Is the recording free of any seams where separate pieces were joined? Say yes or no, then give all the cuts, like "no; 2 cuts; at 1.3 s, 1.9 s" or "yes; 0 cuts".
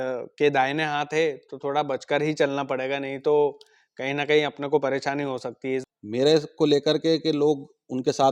no; 1 cut; at 5.9 s